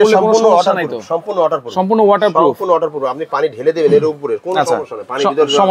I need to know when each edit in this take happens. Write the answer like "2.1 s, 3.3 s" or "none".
none